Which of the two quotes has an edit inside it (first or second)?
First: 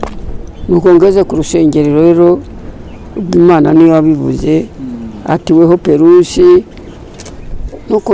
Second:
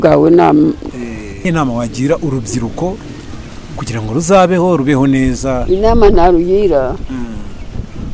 second